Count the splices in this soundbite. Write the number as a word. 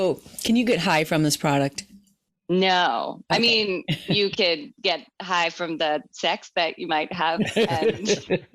zero